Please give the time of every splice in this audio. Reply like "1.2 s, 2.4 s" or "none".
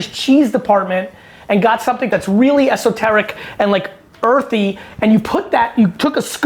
2.1 s

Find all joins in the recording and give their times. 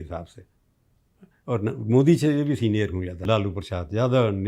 3.2 s

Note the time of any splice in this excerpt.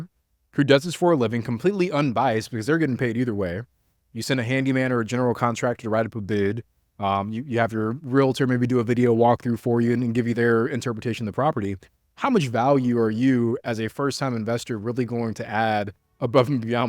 10.3 s

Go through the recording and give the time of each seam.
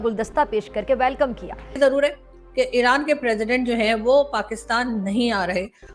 1.8 s

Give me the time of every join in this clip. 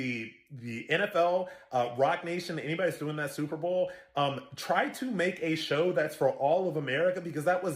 2.1 s

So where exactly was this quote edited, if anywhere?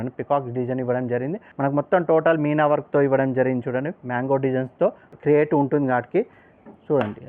1.4 s, 5.2 s

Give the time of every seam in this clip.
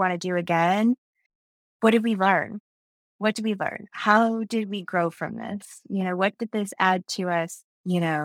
none

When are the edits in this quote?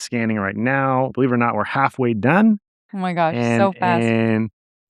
1.1 s

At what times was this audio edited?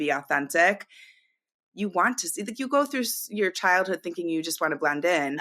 1.5 s

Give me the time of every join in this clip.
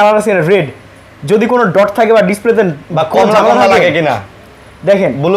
none

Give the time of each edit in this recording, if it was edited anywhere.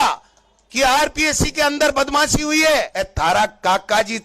3.0 s

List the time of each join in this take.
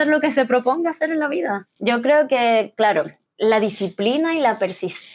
1.7 s, 3.2 s

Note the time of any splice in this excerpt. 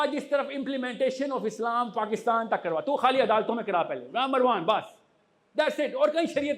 none

